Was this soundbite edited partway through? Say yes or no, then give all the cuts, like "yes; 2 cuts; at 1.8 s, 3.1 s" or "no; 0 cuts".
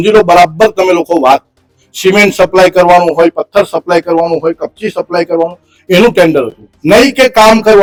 no; 0 cuts